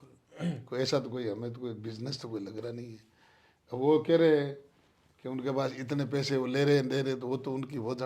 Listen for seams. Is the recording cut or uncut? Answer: uncut